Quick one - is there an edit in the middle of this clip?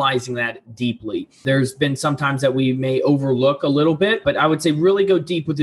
yes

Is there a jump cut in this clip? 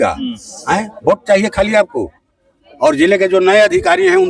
no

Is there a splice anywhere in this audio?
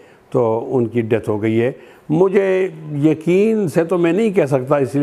no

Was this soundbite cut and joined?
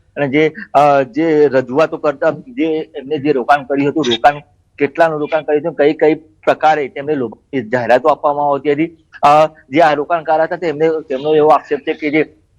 yes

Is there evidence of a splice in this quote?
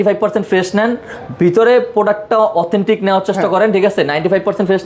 no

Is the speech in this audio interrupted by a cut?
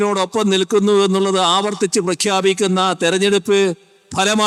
no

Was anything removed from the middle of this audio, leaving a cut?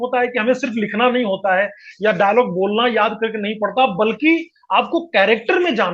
no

